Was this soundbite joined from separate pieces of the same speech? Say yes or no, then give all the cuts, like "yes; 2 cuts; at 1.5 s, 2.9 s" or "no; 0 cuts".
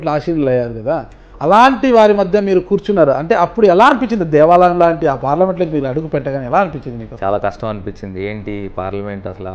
yes; 1 cut; at 7.1 s